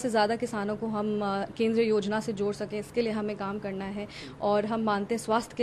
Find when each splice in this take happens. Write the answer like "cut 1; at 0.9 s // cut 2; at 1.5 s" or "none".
none